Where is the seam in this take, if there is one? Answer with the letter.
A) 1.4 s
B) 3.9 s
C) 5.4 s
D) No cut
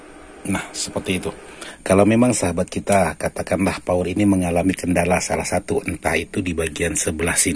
A